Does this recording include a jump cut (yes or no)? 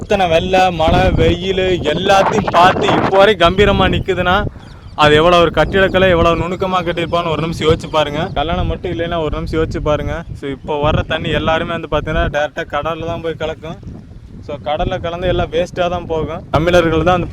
yes